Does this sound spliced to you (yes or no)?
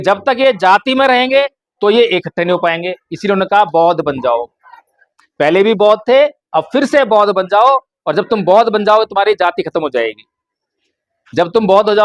no